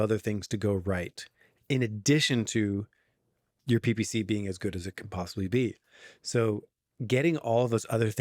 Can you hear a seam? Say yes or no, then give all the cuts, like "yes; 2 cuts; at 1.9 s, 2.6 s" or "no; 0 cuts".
no; 0 cuts